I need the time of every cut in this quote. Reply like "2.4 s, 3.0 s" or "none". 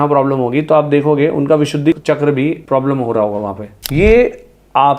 2.0 s, 3.8 s